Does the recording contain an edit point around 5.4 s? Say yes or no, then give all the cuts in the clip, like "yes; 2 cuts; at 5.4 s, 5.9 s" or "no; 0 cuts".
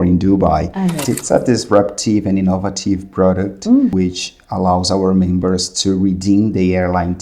no; 2 cuts; at 1.0 s, 3.9 s